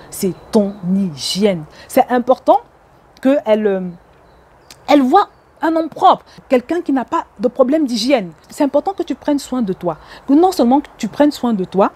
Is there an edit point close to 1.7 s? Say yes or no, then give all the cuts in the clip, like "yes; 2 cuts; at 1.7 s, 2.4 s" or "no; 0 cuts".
yes; 1 cut; at 1.7 s